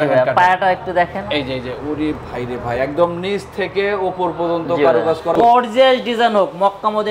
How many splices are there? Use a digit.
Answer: 1